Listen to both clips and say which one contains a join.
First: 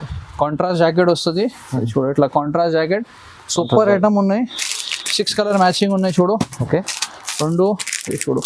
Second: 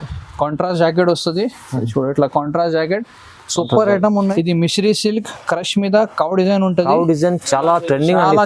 second; 1 cut; at 4.3 s

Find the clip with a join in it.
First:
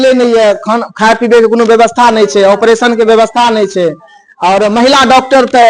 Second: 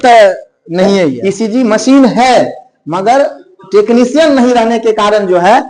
second; 1 cut; at 1.2 s

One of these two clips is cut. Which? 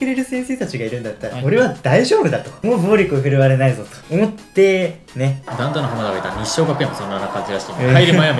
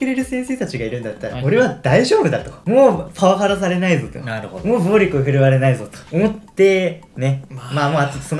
first; 2 cuts; at 2.5 s, 5.4 s

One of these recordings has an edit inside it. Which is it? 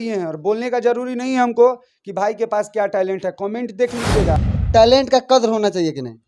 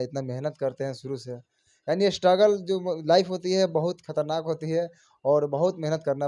first; 1 cut; at 4.5 s

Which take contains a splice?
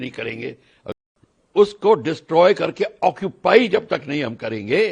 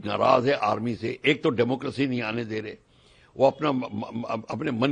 first; 1 cut; at 0.9 s

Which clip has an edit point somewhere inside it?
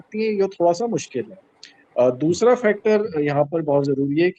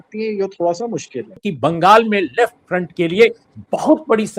second; 1 cut; at 1.5 s

